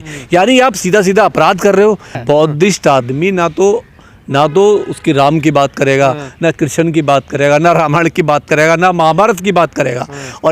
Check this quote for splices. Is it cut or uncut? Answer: cut